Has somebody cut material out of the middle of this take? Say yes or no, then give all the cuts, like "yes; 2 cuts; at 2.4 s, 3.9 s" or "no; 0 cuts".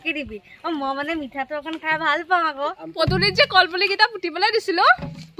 yes; 1 cut; at 2.8 s